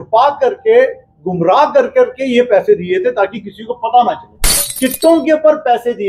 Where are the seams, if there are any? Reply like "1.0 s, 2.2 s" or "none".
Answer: 4.7 s